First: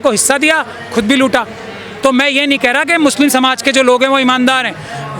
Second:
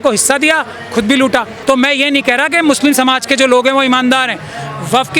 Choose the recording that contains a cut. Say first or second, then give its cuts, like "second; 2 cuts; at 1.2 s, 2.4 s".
second; 1 cut; at 1.5 s